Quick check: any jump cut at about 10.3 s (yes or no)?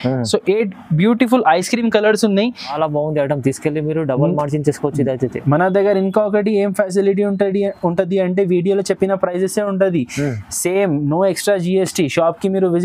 no